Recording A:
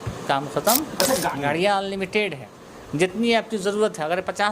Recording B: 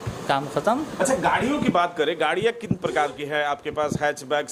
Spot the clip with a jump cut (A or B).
A